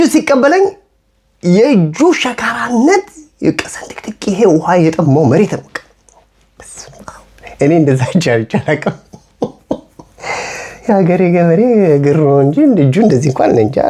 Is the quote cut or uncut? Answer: uncut